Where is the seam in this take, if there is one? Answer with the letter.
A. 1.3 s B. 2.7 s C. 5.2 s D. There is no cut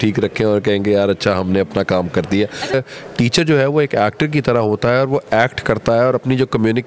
B